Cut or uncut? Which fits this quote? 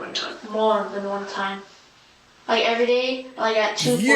uncut